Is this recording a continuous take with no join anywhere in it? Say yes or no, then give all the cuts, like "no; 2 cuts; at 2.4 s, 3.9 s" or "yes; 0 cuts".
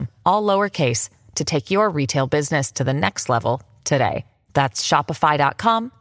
yes; 0 cuts